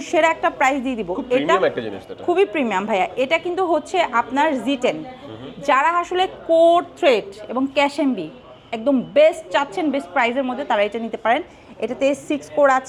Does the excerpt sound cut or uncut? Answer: uncut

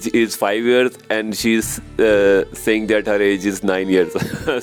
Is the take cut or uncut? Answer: uncut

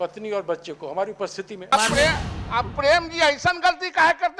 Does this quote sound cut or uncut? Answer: cut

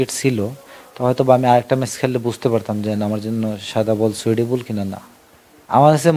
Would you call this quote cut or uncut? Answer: uncut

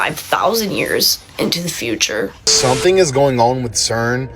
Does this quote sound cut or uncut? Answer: cut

